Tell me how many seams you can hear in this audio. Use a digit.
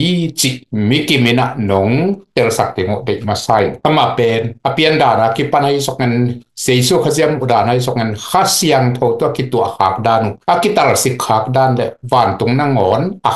1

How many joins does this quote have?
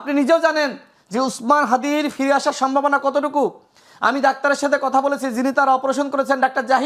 0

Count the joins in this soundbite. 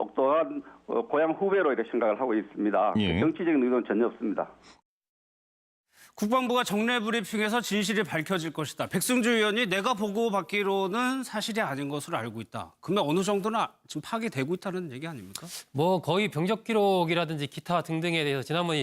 1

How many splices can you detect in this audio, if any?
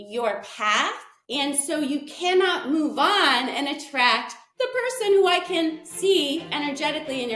1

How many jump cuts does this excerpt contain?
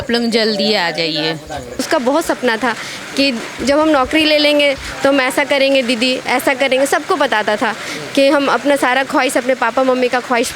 1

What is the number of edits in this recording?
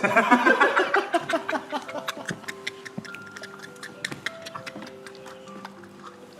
0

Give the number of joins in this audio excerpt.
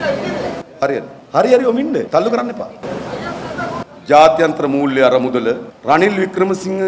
4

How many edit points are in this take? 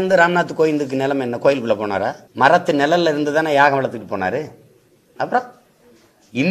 1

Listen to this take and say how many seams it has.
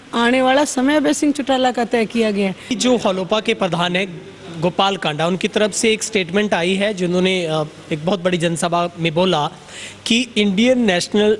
1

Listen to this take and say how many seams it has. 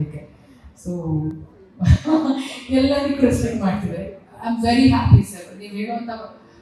0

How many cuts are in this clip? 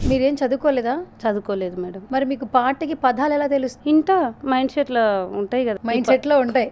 3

